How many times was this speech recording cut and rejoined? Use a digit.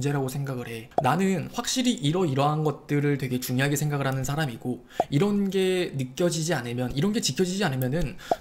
0